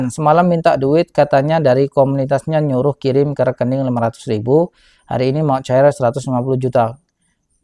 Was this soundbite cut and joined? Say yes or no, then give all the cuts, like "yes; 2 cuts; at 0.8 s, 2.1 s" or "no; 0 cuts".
no; 0 cuts